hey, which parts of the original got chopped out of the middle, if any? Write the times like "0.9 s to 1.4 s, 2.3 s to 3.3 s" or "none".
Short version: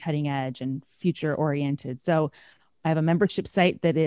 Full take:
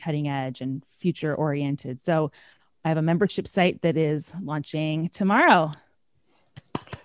none